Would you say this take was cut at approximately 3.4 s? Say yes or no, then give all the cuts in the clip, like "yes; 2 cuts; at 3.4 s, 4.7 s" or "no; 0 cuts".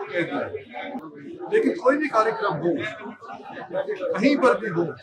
no; 1 cut; at 1.1 s